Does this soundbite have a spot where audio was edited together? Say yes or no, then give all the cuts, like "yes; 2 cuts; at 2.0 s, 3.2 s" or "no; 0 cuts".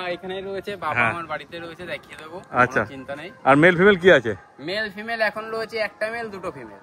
no; 0 cuts